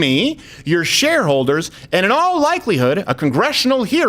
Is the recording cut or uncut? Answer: uncut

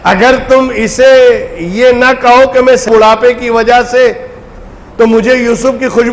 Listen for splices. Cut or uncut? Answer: cut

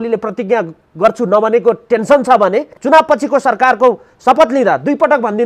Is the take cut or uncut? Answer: cut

